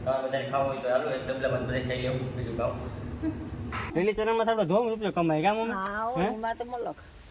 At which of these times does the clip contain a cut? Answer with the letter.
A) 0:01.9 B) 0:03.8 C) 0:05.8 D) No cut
B